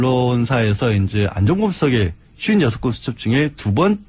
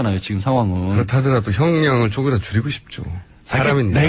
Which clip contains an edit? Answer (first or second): first